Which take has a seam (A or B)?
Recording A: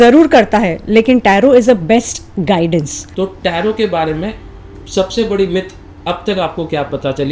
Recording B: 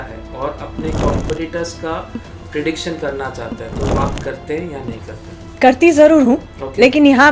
A